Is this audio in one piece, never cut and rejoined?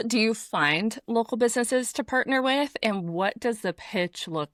yes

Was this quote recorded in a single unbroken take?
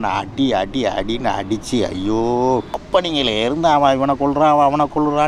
no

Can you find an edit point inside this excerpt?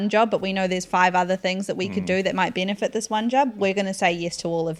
no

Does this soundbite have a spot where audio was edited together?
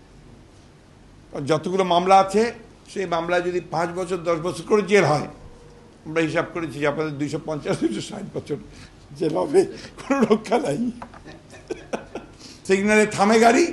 yes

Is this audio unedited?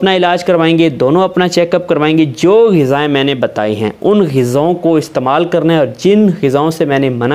yes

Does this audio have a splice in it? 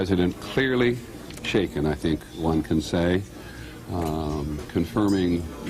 yes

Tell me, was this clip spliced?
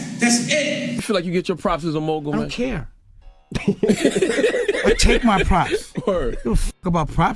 yes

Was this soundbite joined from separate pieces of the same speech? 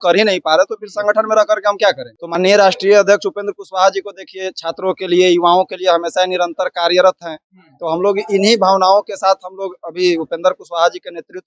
yes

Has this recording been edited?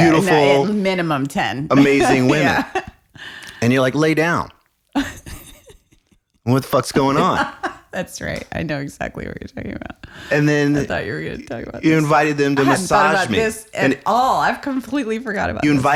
no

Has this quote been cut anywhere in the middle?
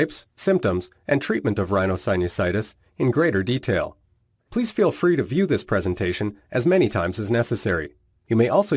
no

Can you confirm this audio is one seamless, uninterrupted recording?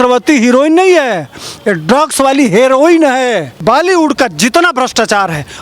no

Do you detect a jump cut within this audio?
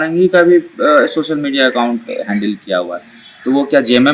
no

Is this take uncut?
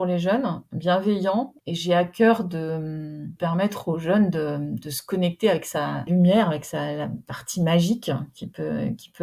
no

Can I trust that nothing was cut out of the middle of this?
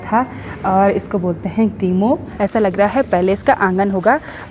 no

